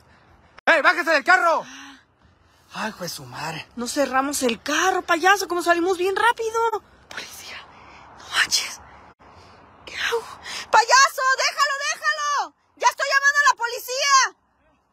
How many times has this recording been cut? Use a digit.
1